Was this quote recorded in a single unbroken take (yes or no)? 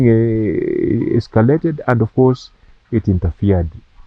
yes